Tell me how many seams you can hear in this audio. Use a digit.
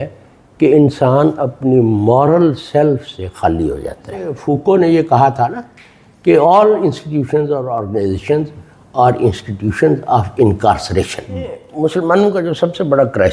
2